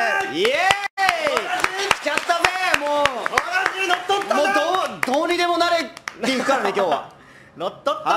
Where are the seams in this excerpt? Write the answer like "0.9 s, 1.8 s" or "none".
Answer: none